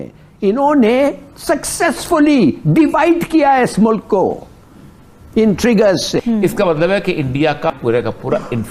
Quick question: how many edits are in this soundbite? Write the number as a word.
two